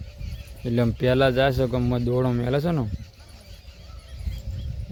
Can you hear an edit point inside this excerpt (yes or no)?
no